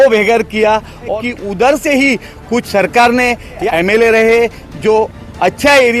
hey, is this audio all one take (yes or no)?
no